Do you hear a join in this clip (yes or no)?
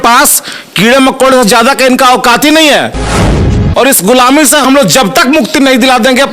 yes